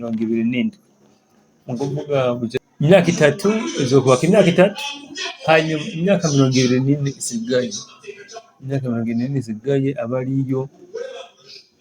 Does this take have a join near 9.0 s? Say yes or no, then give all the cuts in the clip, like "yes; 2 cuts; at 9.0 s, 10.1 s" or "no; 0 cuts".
no; 1 cut; at 2.6 s